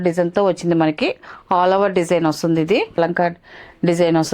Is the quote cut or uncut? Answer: cut